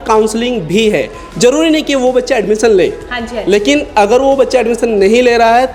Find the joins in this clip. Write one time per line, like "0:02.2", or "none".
none